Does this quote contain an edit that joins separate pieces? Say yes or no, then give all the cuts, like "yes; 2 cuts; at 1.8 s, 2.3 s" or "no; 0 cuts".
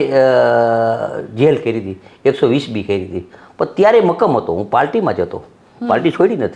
no; 0 cuts